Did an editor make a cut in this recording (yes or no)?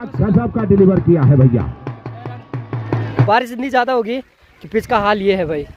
yes